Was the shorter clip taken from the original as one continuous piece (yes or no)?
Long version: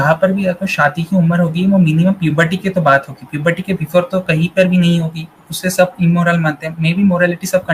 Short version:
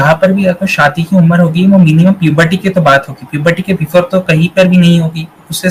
yes